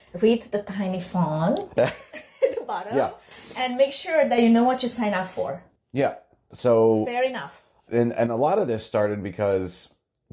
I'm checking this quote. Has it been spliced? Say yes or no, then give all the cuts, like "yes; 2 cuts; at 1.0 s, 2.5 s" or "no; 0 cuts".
no; 0 cuts